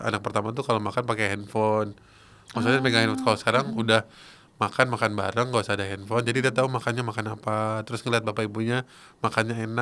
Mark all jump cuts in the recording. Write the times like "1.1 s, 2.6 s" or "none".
none